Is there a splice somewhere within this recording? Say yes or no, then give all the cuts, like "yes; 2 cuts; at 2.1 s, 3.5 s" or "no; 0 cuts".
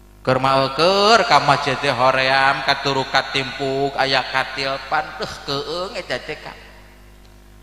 no; 0 cuts